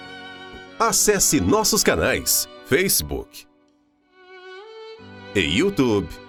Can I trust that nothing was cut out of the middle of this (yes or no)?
yes